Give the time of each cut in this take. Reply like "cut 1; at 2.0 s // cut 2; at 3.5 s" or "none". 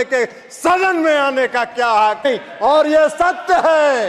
cut 1; at 2.2 s